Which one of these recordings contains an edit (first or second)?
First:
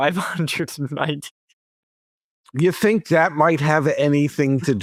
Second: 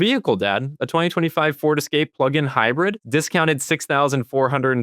second